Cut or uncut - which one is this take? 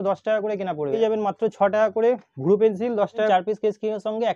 cut